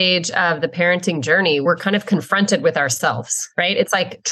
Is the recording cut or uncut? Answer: cut